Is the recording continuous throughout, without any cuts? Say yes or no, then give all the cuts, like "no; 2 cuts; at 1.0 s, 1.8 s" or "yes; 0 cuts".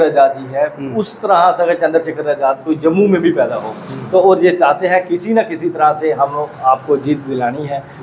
yes; 0 cuts